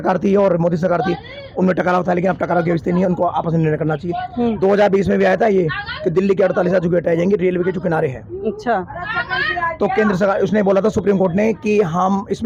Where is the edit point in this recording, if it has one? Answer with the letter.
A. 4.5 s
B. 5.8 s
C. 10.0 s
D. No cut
D